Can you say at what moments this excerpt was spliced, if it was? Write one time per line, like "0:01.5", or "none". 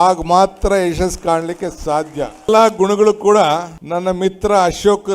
0:02.5
0:03.8